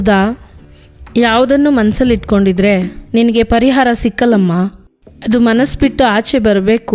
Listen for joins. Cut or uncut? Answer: cut